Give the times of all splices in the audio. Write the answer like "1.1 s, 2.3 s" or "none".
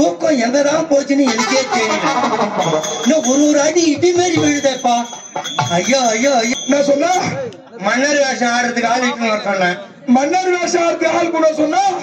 6.5 s